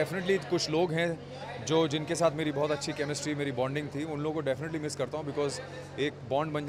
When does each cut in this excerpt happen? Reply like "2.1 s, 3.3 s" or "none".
none